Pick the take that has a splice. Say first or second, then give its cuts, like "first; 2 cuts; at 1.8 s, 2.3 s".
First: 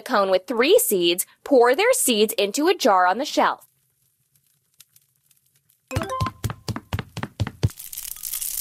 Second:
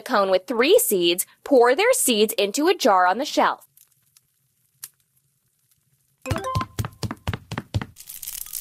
first; 3 cuts; at 3.7 s, 5.9 s, 7.6 s